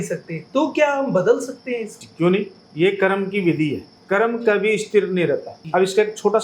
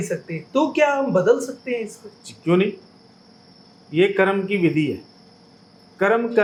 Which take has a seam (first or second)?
first